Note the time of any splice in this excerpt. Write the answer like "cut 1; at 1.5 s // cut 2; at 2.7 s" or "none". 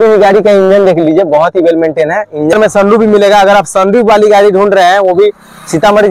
cut 1; at 2.5 s